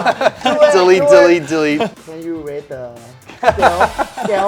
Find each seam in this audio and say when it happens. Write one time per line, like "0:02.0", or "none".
0:02.0